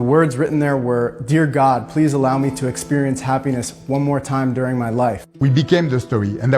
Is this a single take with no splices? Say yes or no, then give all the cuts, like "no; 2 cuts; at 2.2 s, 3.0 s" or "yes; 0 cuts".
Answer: no; 1 cut; at 5.3 s